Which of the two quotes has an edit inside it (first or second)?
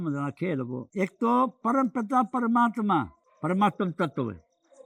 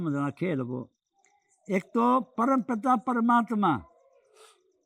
first